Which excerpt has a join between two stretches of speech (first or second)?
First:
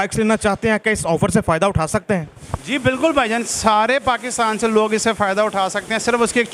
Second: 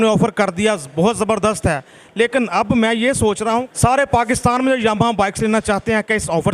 second